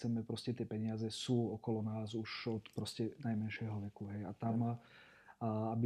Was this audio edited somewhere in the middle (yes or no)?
no